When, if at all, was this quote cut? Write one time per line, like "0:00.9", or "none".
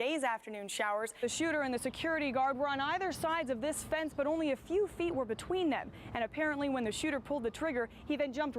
0:01.2